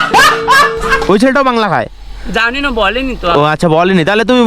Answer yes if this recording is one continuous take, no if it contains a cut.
no